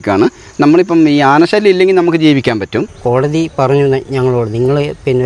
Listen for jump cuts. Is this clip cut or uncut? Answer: cut